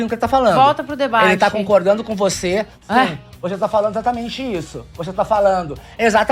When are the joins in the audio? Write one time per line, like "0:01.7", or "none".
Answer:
none